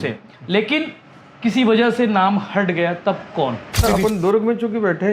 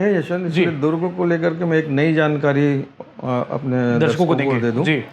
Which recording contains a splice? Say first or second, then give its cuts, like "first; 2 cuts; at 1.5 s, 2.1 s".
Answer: first; 1 cut; at 3.8 s